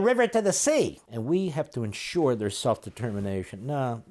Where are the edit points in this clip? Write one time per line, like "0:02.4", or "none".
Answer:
0:01.1